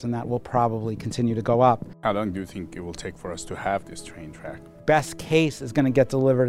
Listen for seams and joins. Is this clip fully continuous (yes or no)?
no